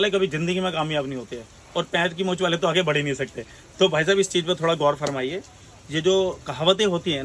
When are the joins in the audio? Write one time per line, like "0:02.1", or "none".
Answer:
none